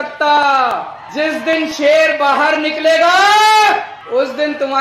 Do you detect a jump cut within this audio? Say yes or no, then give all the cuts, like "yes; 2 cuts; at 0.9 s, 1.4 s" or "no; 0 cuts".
yes; 2 cuts; at 1.0 s, 4.0 s